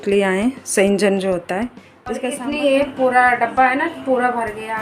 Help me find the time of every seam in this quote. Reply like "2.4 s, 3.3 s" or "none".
2.2 s